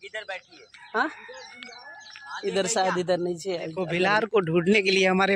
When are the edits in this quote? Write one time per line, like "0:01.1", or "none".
0:03.8